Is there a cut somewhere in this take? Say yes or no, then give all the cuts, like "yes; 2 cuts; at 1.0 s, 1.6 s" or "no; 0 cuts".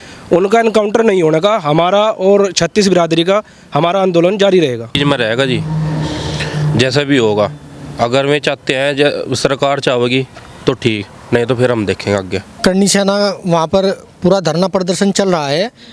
yes; 2 cuts; at 4.9 s, 12.6 s